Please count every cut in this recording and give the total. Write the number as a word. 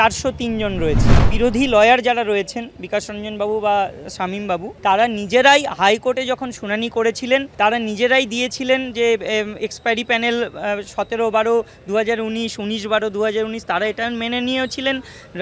three